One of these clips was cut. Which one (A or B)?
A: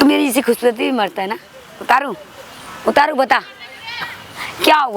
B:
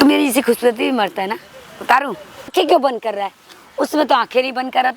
B